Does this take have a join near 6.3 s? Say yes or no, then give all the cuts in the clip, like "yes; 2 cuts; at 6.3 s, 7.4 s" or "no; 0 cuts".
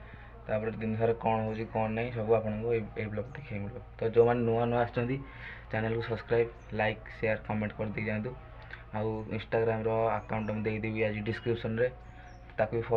no; 0 cuts